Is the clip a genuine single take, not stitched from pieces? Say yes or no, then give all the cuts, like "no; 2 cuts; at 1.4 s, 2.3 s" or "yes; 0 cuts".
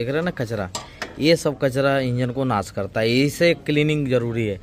yes; 0 cuts